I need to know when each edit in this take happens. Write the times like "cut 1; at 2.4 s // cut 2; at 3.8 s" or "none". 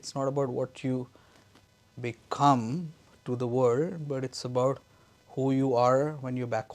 none